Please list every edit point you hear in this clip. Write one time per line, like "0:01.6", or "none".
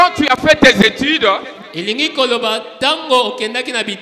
none